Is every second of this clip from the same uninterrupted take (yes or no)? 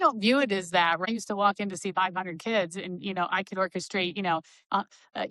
no